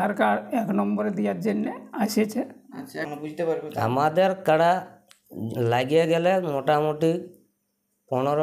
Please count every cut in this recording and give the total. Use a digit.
1